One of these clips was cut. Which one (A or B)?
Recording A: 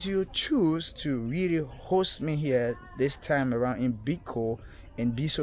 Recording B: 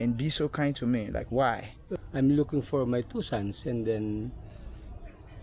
B